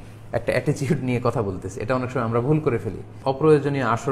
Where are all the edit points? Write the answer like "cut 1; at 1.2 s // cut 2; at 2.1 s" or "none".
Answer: cut 1; at 3.1 s

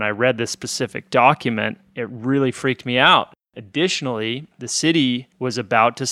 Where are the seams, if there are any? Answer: cut 1; at 3.5 s // cut 2; at 4.6 s

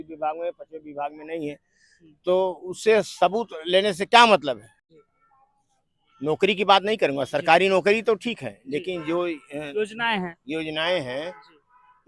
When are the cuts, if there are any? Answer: cut 1; at 4.8 s

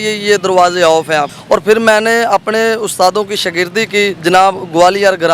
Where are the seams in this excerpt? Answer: cut 1; at 1.3 s // cut 2; at 4.2 s

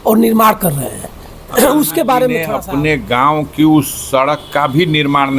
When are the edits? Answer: cut 1; at 2.5 s

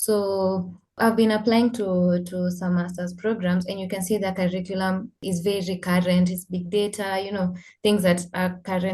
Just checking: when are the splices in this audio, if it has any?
cut 1; at 0.9 s // cut 2; at 5.2 s

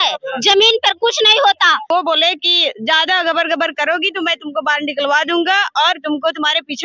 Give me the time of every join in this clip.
cut 1; at 1.9 s

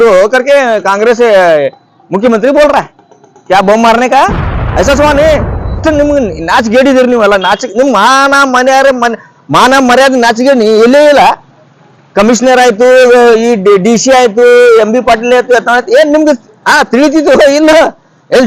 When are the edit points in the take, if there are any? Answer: cut 1; at 5.8 s

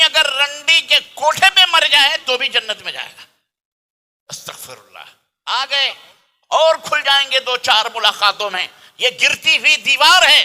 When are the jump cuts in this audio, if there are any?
cut 1; at 5.2 s

